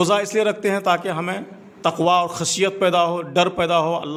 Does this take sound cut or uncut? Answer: uncut